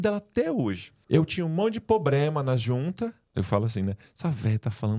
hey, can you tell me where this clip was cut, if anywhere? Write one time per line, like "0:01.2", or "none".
0:00.9
0:03.3